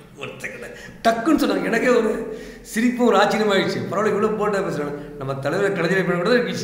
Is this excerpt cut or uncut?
uncut